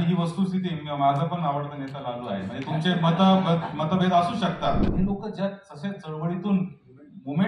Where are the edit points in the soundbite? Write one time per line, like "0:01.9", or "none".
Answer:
0:04.9